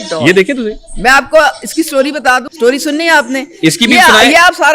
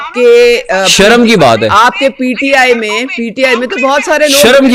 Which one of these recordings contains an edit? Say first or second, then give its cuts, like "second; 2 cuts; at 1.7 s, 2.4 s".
first; 1 cut; at 2.5 s